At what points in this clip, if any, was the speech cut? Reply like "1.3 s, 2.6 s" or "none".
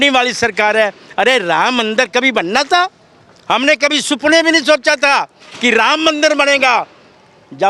none